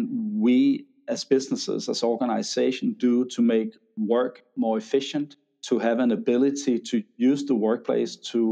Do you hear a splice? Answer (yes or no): no